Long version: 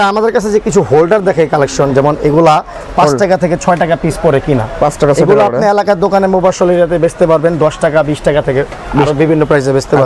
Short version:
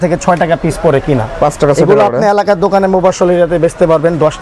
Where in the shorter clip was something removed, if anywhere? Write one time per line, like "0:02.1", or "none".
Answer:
none